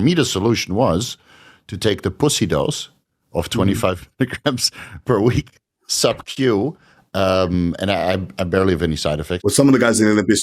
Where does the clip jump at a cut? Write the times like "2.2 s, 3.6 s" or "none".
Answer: 9.4 s